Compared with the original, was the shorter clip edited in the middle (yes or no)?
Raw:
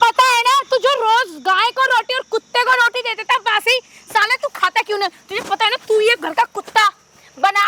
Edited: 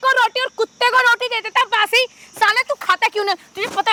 no